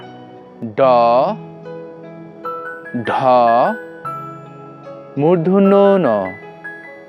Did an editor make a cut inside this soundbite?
yes; 2 cuts; at 3.8 s, 5.1 s

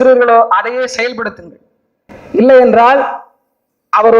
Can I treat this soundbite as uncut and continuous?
yes; 0 cuts

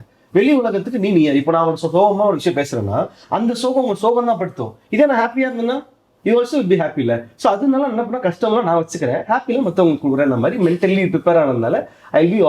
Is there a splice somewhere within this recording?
no; 0 cuts

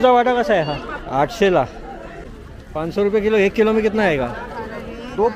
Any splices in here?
yes; 2 cuts; at 0.9 s, 2.3 s

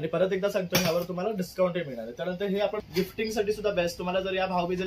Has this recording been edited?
yes; 1 cut; at 2.8 s

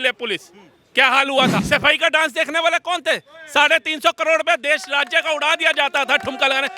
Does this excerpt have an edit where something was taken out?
yes; 1 cut; at 1.6 s

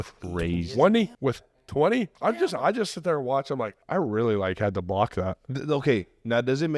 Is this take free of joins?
no; 4 cuts; at 1.1 s, 2.1 s, 3.8 s, 5.5 s

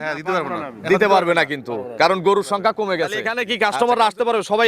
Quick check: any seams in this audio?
yes; 1 cut; at 3.4 s

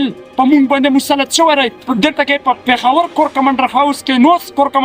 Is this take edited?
yes; 2 cuts; at 1.8 s, 2.6 s

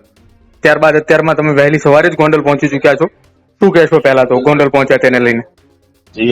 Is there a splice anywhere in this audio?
no; 0 cuts

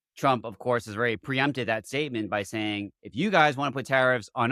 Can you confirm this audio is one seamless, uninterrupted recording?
yes; 0 cuts

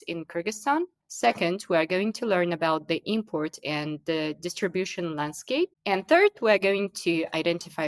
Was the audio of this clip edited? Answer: yes; 1 cut; at 5.8 s

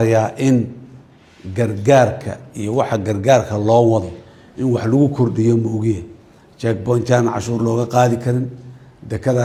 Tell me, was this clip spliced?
no; 0 cuts

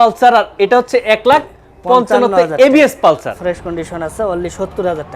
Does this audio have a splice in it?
yes; 1 cut; at 3.4 s

